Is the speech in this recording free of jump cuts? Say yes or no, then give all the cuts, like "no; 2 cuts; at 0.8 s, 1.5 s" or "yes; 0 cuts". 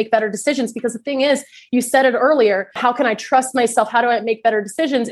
yes; 0 cuts